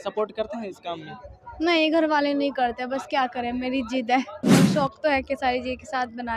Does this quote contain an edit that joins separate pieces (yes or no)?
yes